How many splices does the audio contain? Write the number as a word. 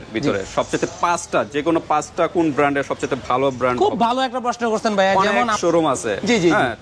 one